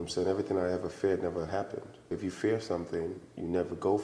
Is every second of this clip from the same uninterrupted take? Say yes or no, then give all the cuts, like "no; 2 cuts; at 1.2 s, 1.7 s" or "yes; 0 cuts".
no; 1 cut; at 2.1 s